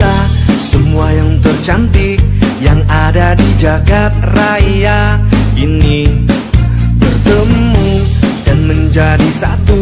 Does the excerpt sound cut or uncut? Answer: uncut